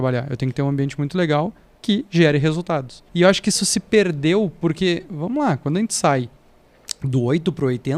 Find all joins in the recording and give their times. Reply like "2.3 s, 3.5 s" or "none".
1.7 s, 3.0 s